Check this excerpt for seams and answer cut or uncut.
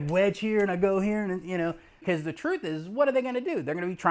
cut